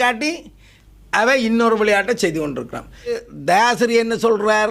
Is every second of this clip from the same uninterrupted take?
no; 1 cut; at 3.2 s

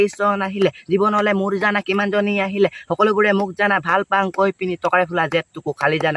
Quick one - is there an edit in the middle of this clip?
no; 0 cuts

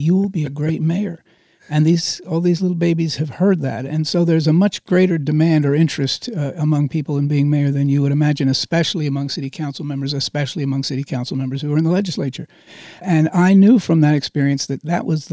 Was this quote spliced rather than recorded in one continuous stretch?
yes; 1 cut; at 13.0 s

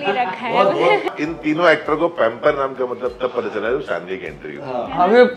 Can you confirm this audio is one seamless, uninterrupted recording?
no; 1 cut; at 1.1 s

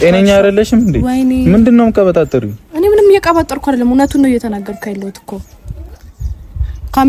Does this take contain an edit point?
no; 0 cuts

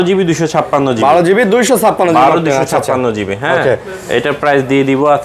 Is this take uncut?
yes; 0 cuts

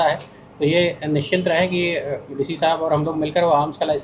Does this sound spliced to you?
no; 0 cuts

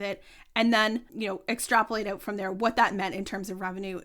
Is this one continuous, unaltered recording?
no; 1 cut; at 1.1 s

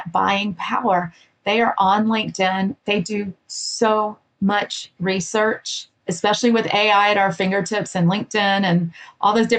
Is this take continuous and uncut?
no; 1 cut; at 5.9 s

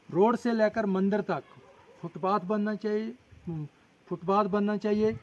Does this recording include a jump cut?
no; 0 cuts

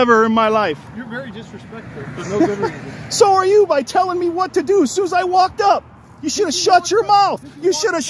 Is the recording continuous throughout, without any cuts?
yes; 0 cuts

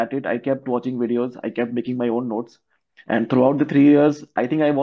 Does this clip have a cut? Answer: no; 0 cuts

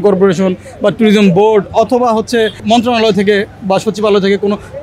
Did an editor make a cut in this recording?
yes; 1 cut; at 2.6 s

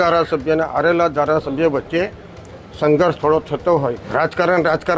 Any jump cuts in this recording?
yes; 1 cut; at 4.0 s

